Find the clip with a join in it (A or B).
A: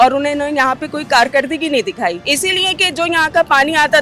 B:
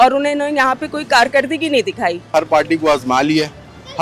B